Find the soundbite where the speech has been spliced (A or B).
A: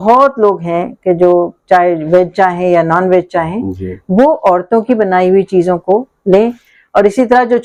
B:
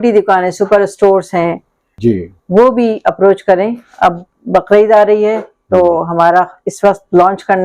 B